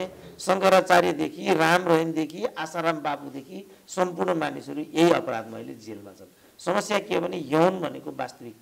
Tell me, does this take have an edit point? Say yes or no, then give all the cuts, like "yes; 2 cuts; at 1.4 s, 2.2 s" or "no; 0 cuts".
no; 0 cuts